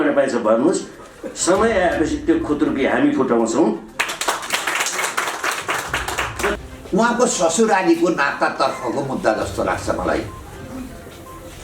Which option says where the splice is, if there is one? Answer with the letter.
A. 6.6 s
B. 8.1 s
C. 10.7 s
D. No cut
A